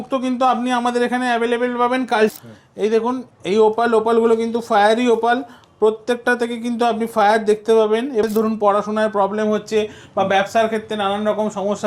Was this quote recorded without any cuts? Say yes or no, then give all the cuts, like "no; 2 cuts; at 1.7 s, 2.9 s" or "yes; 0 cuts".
no; 2 cuts; at 2.3 s, 8.2 s